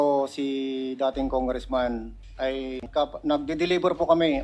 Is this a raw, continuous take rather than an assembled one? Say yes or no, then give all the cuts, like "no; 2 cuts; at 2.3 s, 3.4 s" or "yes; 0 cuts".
no; 1 cut; at 2.6 s